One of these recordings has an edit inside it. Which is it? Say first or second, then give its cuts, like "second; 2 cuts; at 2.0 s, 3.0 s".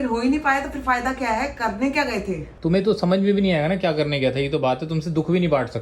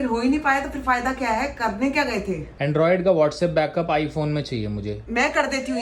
second; 2 cuts; at 2.5 s, 5.0 s